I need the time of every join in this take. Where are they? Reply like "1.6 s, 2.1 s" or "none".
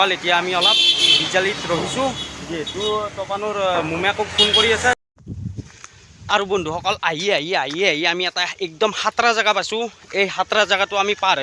5.3 s